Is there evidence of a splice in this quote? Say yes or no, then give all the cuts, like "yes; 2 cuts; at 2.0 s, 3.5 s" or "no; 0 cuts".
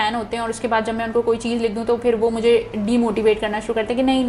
no; 0 cuts